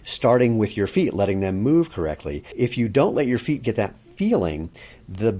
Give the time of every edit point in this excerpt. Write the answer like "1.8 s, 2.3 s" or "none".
2.5 s